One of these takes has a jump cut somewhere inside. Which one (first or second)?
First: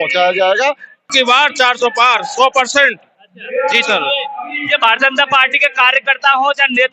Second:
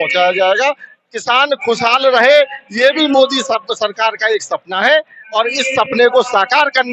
first